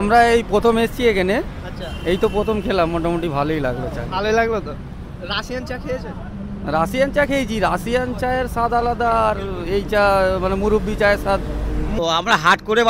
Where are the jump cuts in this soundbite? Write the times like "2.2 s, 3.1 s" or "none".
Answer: 12.0 s